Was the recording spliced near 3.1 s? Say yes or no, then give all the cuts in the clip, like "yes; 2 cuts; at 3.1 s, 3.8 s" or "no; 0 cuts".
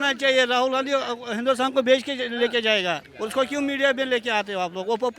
yes; 1 cut; at 3.1 s